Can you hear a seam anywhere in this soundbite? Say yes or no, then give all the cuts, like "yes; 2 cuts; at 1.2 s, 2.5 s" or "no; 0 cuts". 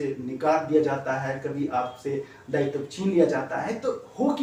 no; 0 cuts